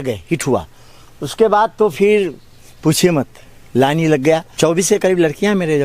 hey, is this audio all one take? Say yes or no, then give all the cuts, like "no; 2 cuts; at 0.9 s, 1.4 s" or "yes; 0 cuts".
no; 1 cut; at 4.6 s